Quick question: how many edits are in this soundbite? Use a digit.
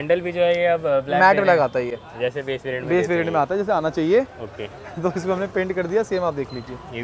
0